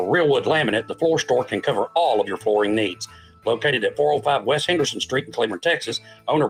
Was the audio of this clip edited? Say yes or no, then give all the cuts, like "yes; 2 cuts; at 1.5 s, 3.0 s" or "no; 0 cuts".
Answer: no; 0 cuts